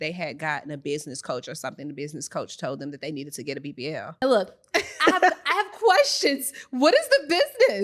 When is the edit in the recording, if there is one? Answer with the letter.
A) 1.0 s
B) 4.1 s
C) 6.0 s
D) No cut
B